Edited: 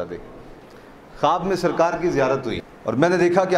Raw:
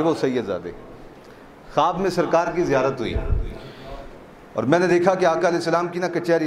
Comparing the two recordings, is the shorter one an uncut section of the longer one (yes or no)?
no